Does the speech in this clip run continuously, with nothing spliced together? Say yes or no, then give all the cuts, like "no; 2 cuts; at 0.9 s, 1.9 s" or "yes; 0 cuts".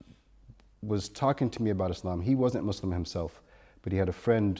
yes; 0 cuts